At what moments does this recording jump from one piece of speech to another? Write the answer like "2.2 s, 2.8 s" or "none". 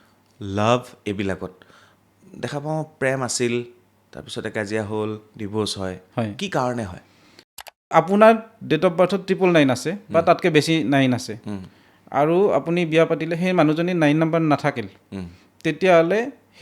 7.8 s